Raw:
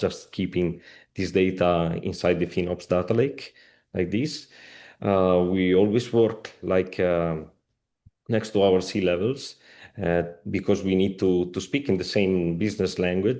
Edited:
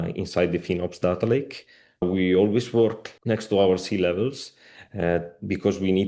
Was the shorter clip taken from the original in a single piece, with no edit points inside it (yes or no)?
no